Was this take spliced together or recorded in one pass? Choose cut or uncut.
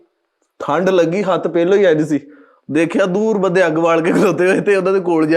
uncut